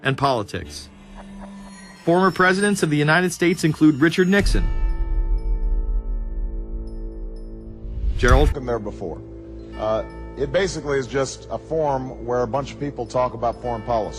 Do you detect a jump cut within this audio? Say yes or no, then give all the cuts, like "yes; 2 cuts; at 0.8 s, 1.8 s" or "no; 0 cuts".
no; 0 cuts